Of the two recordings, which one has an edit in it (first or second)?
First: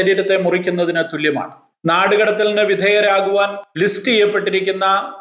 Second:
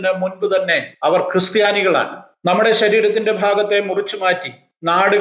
second